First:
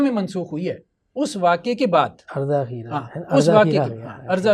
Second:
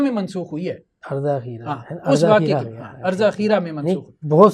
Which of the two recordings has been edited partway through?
second; 1 cut; at 1.0 s

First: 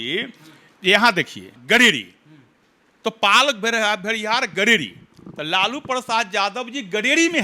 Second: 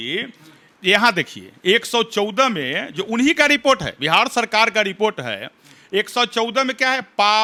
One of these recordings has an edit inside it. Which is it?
first; 1 cut; at 1.5 s

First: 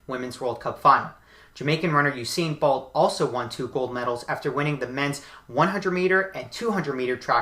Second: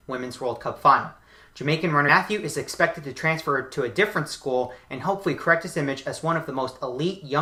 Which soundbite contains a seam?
first; 1 cut; at 2.1 s

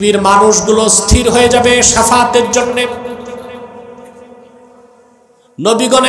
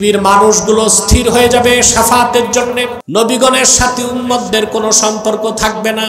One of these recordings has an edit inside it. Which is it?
second; 1 cut; at 3.0 s

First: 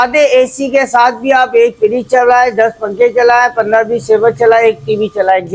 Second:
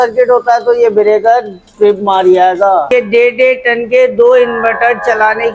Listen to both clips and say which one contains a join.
second; 1 cut; at 2.9 s

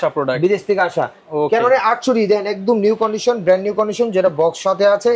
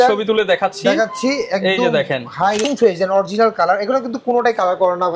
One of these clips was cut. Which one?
second; 1 cut; at 2.7 s

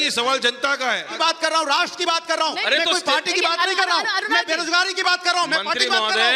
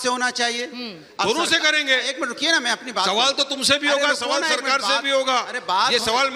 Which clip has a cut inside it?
first; 1 cut; at 1.1 s

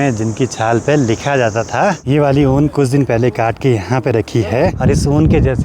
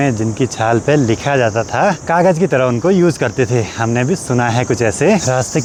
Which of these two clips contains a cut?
first; 2 cuts; at 2.0 s, 4.8 s

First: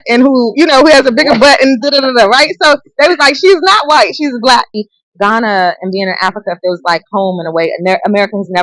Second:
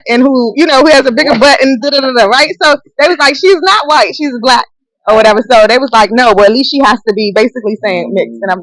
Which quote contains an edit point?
first; 1 cut; at 4.9 s

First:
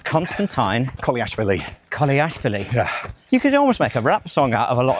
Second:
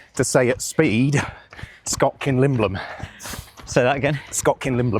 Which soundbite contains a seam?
first; 1 cut; at 3.1 s

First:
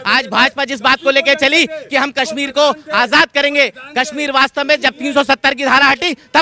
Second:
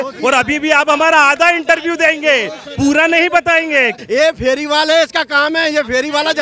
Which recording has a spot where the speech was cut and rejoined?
second; 1 cut; at 3.9 s

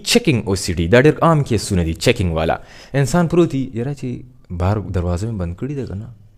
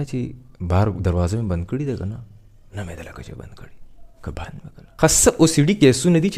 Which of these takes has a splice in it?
second; 1 cut; at 5.0 s

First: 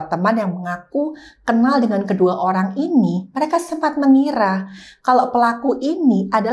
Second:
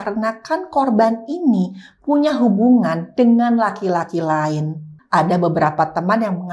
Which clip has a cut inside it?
second; 1 cut; at 4.9 s

